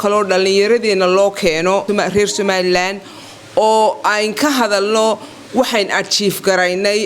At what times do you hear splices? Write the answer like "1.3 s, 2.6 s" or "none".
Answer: 1.8 s